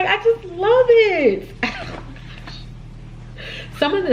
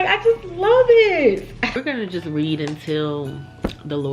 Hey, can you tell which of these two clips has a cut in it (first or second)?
second